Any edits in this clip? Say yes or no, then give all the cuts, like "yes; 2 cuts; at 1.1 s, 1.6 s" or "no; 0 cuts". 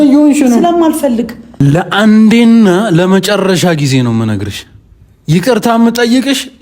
yes; 1 cut; at 1.4 s